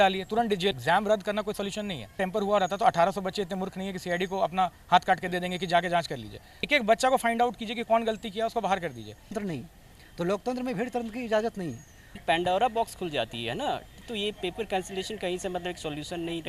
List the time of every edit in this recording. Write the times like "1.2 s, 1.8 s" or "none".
0.8 s, 2.2 s, 6.7 s, 9.4 s, 12.2 s

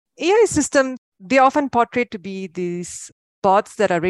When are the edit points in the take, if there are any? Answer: 1.0 s, 3.0 s

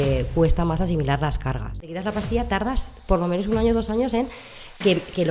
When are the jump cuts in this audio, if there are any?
2.0 s

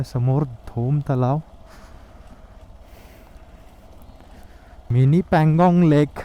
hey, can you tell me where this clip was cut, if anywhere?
4.9 s

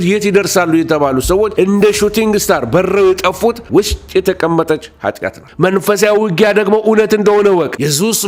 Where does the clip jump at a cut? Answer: 5.3 s

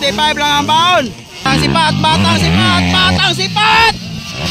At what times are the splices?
1.5 s

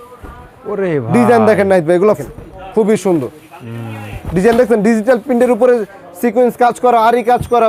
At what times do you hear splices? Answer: 2.2 s

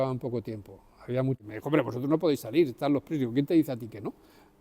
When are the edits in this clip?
1.4 s

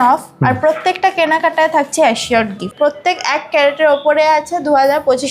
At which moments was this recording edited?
2.7 s

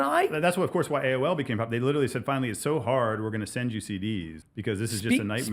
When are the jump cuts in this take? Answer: 4.4 s

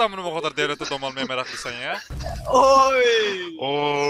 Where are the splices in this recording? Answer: 2.1 s

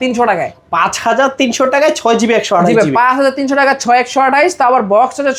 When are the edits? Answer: none

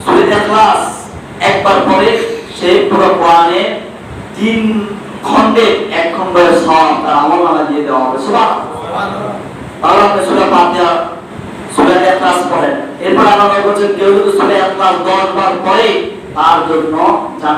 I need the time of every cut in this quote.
none

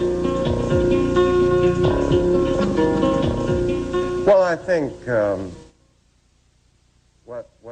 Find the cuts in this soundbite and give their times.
none

